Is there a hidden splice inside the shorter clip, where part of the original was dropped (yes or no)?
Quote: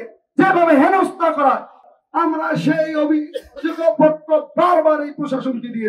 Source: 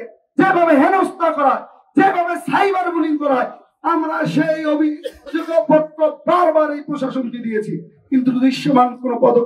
yes